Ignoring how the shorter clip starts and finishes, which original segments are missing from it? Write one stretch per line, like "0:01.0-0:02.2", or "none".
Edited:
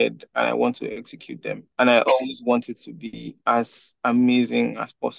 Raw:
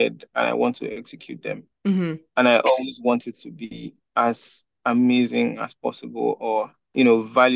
0:01.6-0:02.2
0:03.9-0:04.0
0:04.5-0:04.6